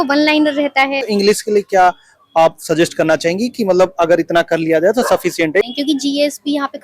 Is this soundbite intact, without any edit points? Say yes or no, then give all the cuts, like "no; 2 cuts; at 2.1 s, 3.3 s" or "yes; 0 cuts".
no; 2 cuts; at 1.0 s, 5.6 s